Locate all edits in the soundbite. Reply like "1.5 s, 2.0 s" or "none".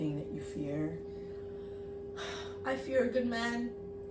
none